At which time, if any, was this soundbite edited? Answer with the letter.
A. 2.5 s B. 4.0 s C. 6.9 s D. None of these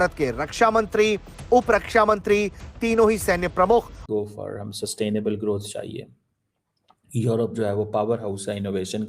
B